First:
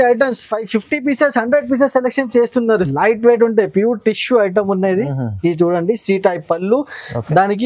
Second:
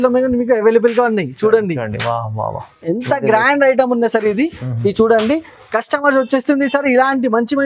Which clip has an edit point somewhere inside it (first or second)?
first